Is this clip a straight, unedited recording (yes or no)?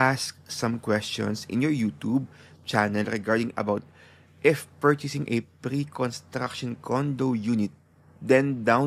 yes